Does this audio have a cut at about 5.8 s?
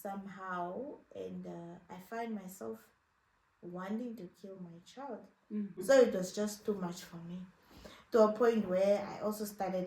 yes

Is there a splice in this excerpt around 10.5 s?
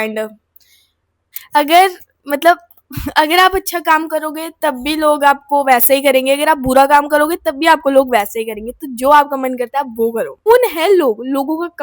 yes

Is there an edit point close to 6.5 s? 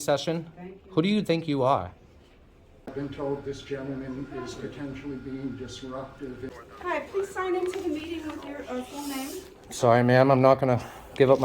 yes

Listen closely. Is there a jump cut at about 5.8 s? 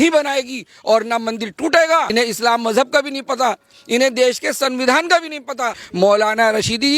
yes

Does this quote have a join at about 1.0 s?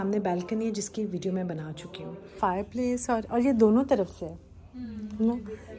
no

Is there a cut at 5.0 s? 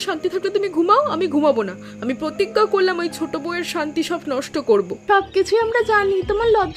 yes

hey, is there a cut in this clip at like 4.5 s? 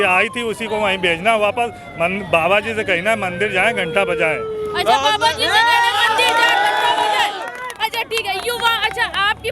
no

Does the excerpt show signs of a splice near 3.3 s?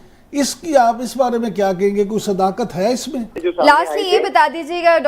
yes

